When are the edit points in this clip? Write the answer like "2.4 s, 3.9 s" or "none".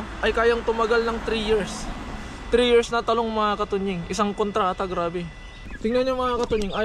5.9 s